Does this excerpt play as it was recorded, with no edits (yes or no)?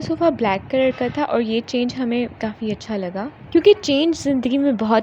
yes